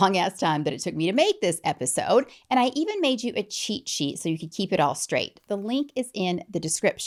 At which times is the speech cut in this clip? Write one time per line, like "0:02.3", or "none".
none